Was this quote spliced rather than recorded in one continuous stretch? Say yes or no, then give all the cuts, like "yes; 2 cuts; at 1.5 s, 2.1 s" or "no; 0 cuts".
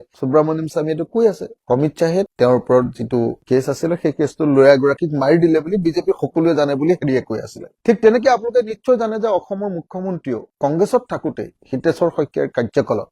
no; 0 cuts